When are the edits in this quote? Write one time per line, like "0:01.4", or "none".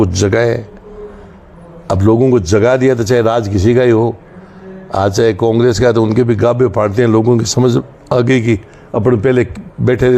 none